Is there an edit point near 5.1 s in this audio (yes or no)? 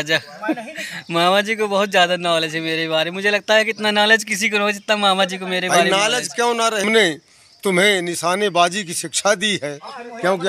no